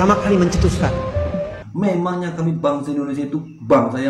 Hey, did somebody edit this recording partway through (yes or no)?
yes